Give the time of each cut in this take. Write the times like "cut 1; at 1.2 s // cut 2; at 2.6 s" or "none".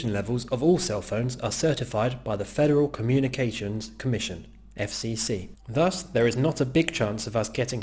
cut 1; at 2.5 s